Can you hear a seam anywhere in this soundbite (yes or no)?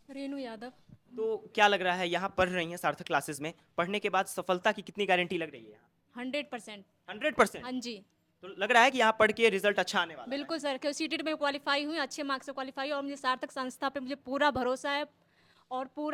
no